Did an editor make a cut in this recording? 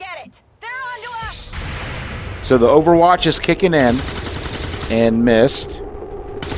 yes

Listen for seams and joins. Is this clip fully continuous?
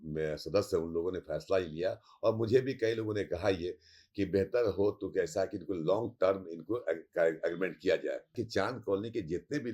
no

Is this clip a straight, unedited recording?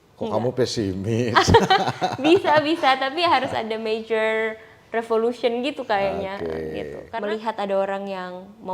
no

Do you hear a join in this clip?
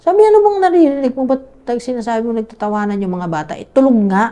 no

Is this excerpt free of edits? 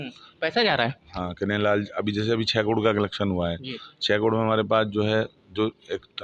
yes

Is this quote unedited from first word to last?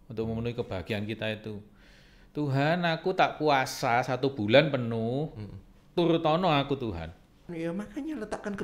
no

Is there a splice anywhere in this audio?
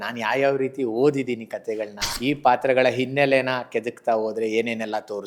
yes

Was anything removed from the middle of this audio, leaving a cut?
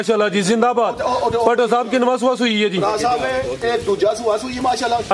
no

